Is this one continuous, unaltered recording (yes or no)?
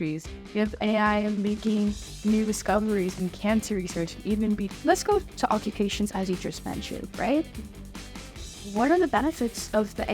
no